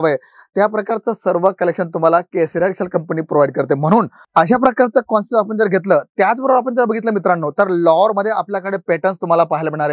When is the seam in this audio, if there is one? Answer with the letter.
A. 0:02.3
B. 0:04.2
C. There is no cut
B